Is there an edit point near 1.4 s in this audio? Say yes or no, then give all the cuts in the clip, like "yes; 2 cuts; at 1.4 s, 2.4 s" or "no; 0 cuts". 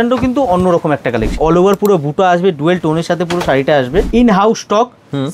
yes; 2 cuts; at 1.4 s, 4.1 s